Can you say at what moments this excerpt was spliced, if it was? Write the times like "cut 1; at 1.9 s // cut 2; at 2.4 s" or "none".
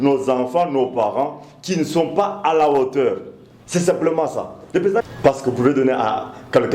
cut 1; at 5.0 s